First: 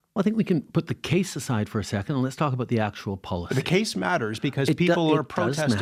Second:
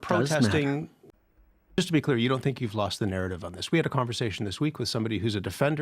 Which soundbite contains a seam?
second; 1 cut; at 1.5 s

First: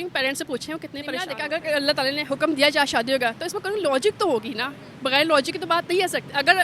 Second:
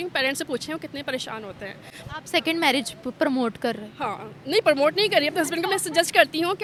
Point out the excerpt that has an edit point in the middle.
first; 1 cut; at 1.4 s

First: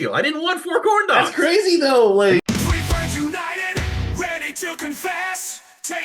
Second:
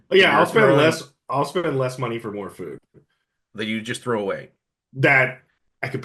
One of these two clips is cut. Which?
first; 1 cut; at 2.4 s

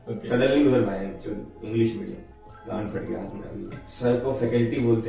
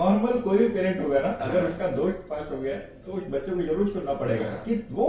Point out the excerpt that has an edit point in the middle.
first; 2 cuts; at 2.3 s, 3.8 s

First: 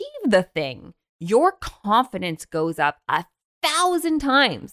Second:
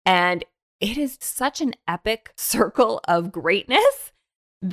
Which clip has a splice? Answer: second; 2 cuts; at 1.2 s, 2.3 s

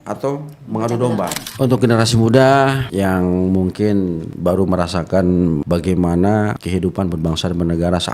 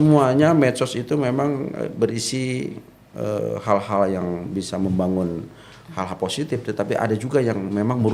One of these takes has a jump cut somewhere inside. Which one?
first; 5 cuts; at 1.4 s, 2.8 s, 4.3 s, 5.6 s, 6.6 s

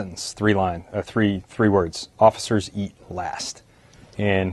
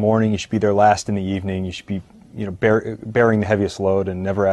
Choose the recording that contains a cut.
second; 1 cut; at 2.5 s

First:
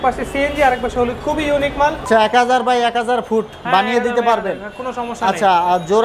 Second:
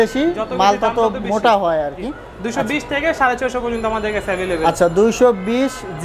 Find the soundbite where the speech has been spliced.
first; 1 cut; at 2.1 s

